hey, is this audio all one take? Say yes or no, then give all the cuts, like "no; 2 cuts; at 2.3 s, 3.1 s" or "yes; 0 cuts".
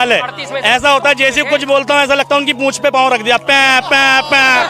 yes; 0 cuts